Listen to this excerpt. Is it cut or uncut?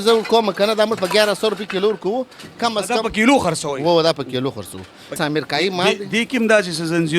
cut